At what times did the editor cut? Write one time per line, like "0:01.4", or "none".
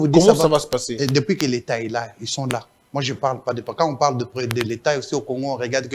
none

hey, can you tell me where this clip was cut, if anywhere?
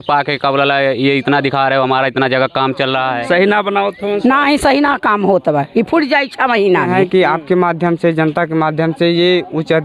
0:03.2
0:06.9

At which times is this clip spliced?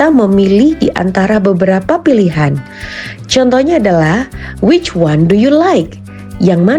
0:04.4

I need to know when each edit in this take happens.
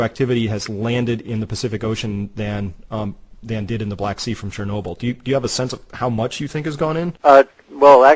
none

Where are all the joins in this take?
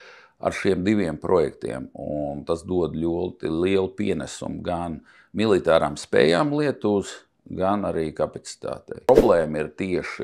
0:09.1

